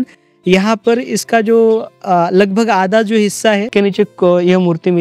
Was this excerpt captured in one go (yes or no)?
no